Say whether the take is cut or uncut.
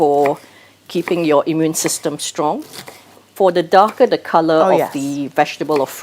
cut